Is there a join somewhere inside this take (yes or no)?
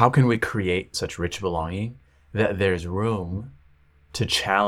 yes